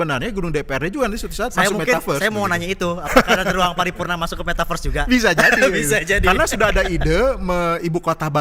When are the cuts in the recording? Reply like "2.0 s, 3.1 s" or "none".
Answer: none